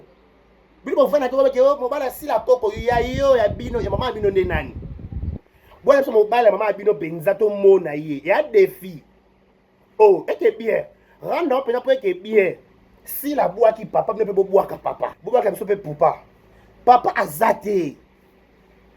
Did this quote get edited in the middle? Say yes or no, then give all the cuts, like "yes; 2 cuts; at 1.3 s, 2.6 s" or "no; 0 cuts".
yes; 1 cut; at 15.2 s